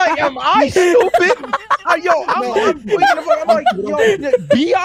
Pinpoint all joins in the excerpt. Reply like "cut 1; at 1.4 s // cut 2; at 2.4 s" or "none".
none